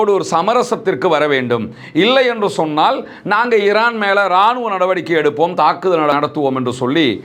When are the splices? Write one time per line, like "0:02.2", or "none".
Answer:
0:06.1